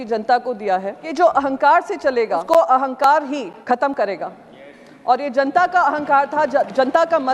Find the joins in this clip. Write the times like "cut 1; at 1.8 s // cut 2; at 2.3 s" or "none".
cut 1; at 1.0 s // cut 2; at 2.4 s // cut 3; at 3.6 s